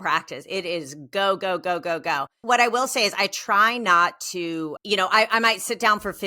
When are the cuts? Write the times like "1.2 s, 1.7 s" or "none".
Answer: 2.4 s

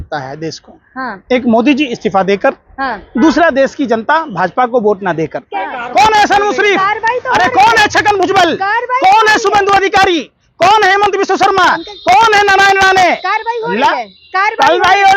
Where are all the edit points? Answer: 5.4 s

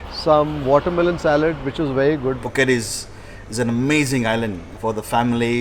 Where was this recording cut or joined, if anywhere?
2.4 s, 4.6 s

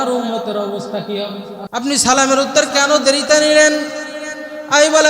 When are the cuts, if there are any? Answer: 1.6 s

